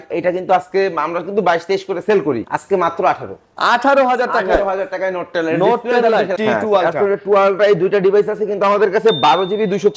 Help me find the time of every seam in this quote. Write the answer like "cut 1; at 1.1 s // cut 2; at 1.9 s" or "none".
cut 1; at 2.5 s // cut 2; at 6.3 s